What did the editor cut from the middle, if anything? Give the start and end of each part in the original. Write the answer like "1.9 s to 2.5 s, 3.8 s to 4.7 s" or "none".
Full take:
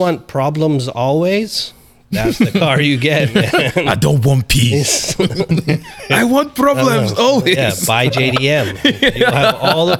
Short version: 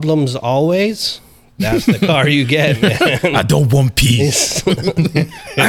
none